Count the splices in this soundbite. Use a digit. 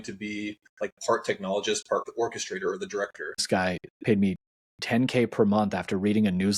2